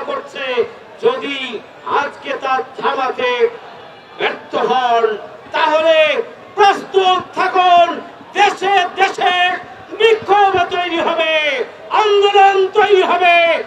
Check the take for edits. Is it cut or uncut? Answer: uncut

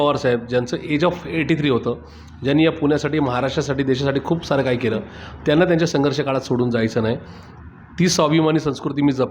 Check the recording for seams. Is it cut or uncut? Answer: uncut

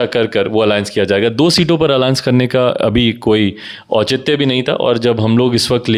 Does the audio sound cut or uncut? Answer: uncut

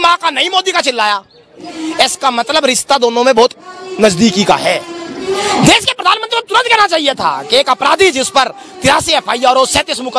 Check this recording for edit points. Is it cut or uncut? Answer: uncut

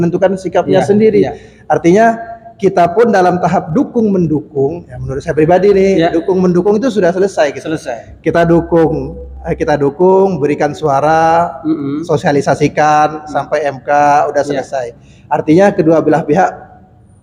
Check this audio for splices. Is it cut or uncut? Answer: uncut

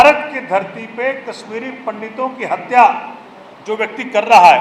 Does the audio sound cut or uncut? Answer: uncut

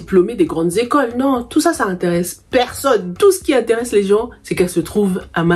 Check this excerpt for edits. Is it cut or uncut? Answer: uncut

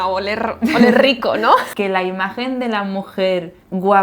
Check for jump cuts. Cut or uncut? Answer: cut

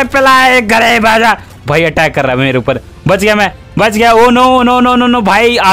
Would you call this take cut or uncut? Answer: uncut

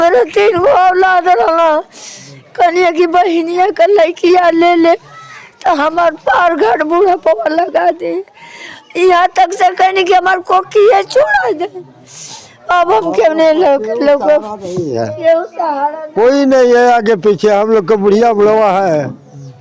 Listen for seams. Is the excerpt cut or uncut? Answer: uncut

